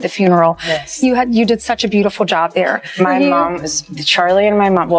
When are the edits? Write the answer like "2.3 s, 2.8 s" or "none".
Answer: 3.0 s